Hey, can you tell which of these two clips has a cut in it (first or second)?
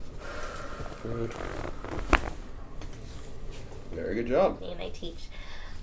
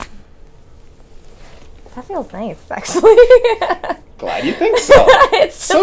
first